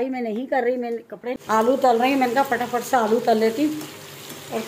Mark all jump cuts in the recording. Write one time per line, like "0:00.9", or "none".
0:01.4